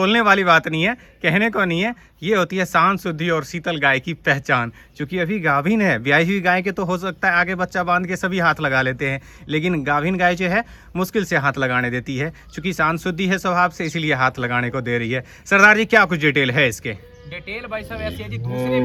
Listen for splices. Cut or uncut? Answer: uncut